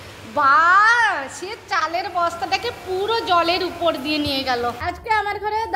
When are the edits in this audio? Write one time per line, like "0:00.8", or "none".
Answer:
0:04.8

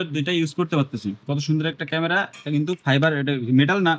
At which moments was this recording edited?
0:01.3

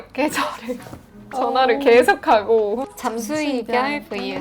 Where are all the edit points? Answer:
0:01.2
0:02.9

